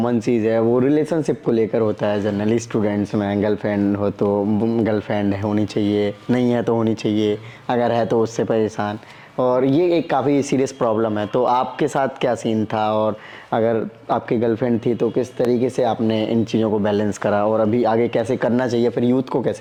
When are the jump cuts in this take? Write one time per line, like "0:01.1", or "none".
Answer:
none